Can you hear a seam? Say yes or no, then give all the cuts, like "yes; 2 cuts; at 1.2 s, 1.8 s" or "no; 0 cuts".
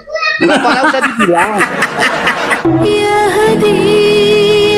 yes; 1 cut; at 2.6 s